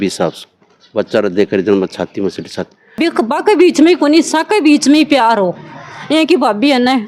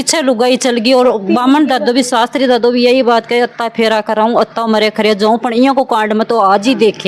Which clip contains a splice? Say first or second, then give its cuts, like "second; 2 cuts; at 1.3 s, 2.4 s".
first; 1 cut; at 2.9 s